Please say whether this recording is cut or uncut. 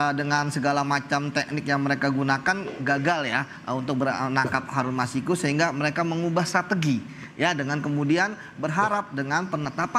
uncut